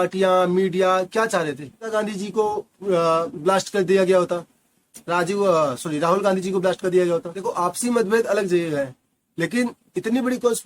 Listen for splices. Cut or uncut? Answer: cut